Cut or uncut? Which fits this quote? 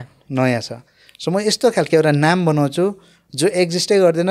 uncut